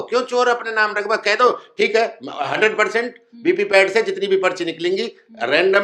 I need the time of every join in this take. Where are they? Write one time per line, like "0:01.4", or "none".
none